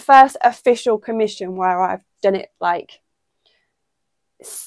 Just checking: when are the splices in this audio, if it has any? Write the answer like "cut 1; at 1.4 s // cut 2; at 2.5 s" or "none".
none